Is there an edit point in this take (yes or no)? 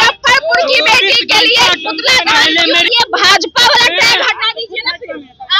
yes